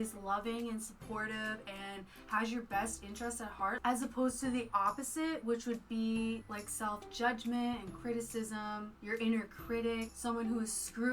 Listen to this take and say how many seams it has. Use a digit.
4